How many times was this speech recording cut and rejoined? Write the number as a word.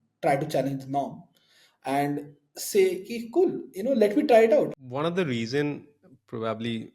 one